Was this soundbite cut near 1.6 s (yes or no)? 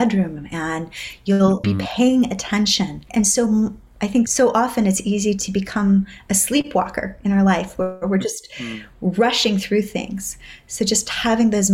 yes